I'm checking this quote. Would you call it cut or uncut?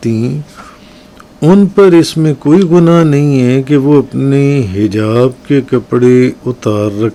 uncut